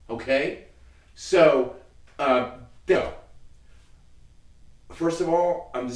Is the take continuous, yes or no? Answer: no